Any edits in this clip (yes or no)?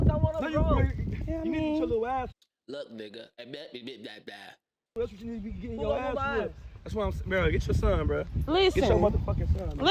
no